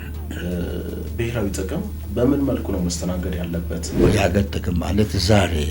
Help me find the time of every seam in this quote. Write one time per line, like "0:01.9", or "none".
0:04.0